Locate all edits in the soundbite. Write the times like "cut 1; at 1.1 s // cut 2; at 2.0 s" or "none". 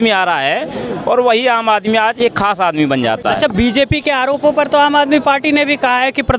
none